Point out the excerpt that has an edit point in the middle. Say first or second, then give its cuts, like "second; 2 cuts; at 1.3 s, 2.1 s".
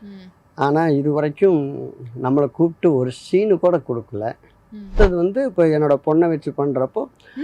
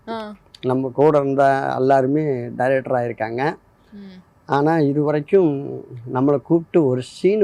first; 1 cut; at 4.9 s